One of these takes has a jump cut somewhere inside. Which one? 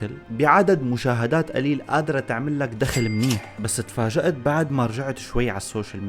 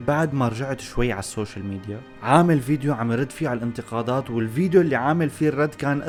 first; 1 cut; at 3.5 s

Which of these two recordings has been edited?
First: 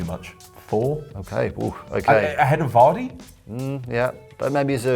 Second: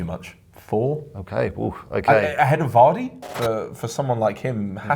second; 1 cut; at 3.3 s

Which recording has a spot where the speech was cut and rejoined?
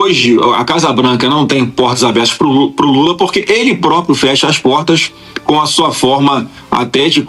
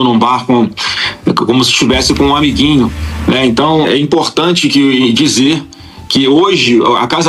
second; 1 cut; at 3.8 s

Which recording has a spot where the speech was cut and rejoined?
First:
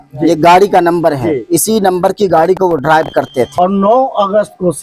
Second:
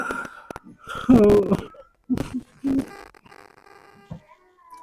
first; 1 cut; at 3.5 s

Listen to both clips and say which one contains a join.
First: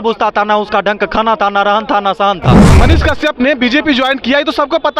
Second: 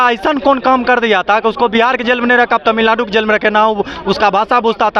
first; 1 cut; at 2.7 s

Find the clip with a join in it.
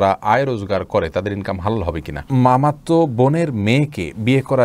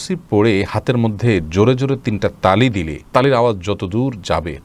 first; 1 cut; at 2.2 s

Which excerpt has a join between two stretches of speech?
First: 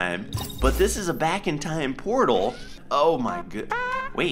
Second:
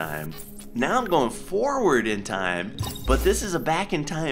first; 1 cut; at 2.8 s

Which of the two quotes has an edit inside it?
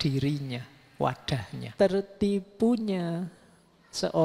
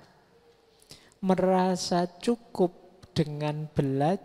first; 1 cut; at 1.6 s

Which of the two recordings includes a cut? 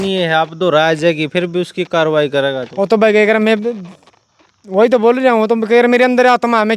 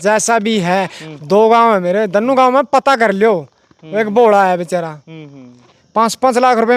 second; 1 cut; at 5.8 s

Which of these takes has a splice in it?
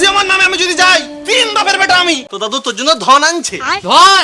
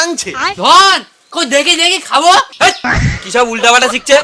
first; 1 cut; at 2.3 s

